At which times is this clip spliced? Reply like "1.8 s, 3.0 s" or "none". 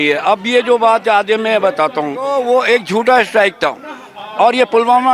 2.3 s